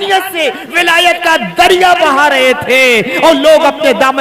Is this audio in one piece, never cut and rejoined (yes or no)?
yes